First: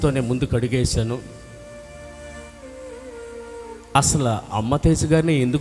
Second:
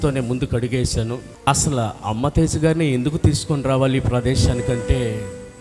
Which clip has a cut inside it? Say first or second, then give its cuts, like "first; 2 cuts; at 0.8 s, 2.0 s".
second; 1 cut; at 1.3 s